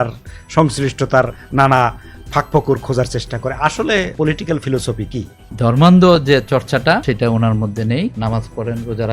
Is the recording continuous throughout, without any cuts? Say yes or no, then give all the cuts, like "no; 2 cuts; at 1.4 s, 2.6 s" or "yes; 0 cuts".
no; 4 cuts; at 4.1 s, 5.4 s, 7.0 s, 8.2 s